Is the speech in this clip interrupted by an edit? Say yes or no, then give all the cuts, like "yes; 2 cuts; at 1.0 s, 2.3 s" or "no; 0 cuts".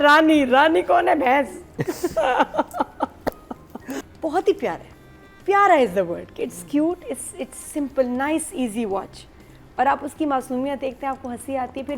yes; 1 cut; at 4.1 s